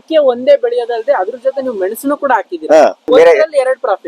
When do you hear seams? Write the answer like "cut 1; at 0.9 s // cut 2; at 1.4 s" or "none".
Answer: cut 1; at 3.1 s